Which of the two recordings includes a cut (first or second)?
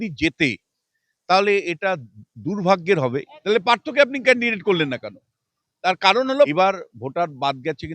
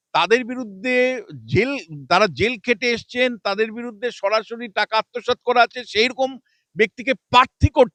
first